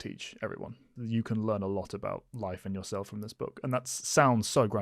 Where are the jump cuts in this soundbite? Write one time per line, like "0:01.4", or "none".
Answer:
0:00.9